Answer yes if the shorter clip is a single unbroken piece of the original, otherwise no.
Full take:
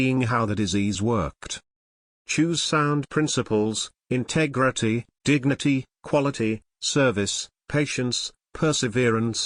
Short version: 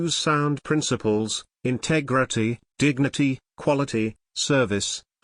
yes